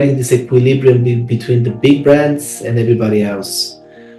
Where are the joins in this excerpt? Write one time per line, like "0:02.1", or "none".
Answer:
none